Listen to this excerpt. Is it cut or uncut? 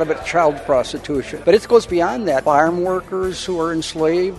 cut